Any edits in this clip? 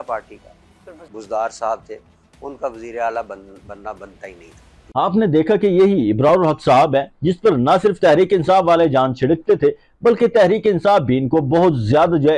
no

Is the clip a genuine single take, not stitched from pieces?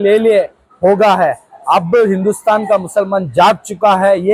yes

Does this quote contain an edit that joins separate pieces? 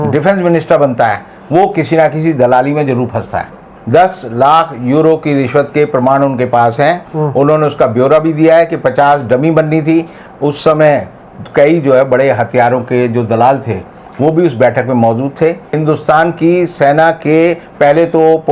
yes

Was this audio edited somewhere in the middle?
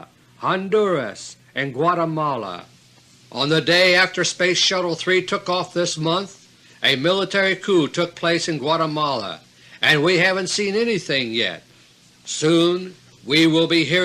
no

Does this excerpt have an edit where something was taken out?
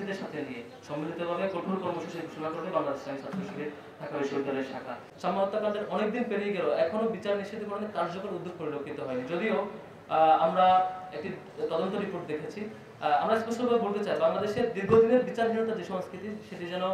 yes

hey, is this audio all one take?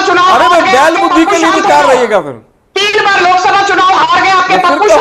yes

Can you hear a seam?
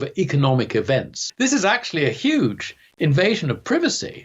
yes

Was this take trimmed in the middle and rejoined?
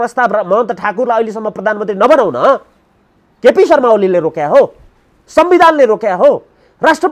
no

